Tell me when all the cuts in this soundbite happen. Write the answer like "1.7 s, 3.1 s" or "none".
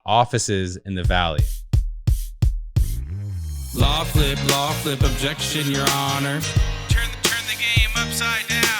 1.7 s